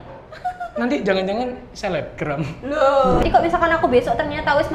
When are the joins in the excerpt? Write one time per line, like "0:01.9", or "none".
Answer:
0:03.2